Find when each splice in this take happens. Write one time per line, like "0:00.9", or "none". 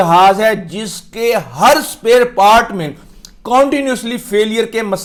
none